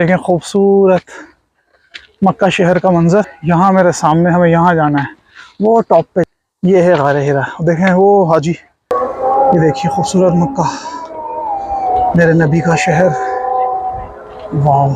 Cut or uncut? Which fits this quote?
cut